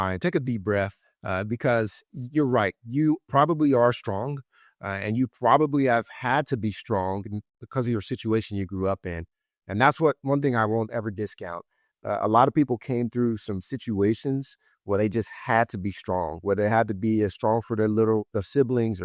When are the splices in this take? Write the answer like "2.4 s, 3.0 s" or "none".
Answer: 7.6 s